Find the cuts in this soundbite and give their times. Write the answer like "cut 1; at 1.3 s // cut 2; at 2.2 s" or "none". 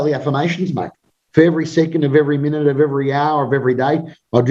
cut 1; at 1.0 s